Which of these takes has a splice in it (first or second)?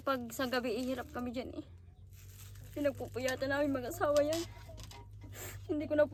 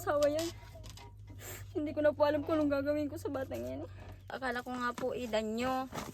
second